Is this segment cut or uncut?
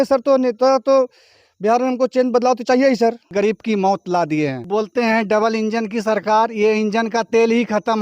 cut